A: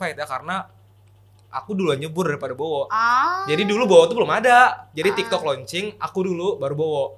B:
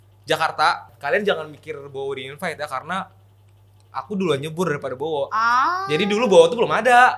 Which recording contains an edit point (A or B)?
B